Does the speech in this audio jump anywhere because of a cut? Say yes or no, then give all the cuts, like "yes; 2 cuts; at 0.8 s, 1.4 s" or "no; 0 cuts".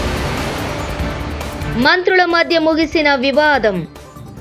yes; 1 cut; at 1.6 s